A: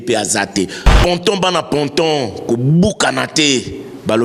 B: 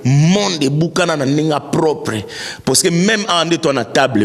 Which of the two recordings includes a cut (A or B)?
A